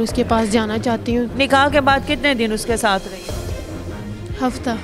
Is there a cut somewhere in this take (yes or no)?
yes